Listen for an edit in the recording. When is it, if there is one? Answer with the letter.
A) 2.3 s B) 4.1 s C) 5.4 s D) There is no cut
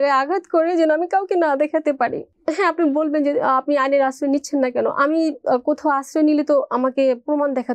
A